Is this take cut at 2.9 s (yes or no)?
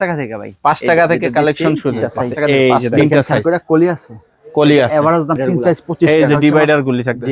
yes